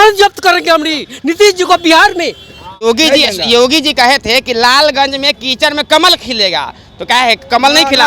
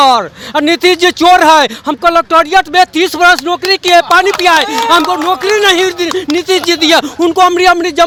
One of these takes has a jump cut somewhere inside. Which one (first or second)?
first